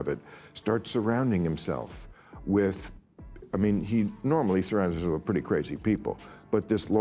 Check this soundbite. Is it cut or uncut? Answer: uncut